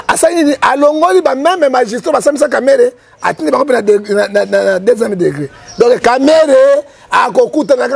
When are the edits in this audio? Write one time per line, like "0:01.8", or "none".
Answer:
none